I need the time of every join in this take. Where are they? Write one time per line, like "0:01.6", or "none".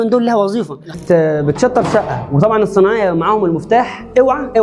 0:01.0